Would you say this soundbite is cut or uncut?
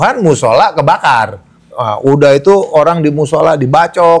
cut